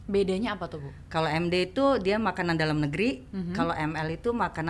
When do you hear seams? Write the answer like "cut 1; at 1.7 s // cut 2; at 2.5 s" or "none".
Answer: none